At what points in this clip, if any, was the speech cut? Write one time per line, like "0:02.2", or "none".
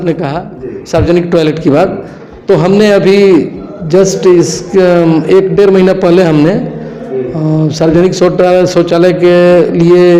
none